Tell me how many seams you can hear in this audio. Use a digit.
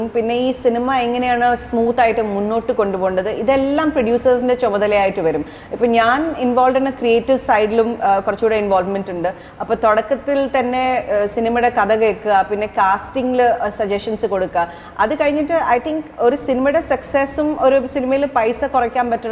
0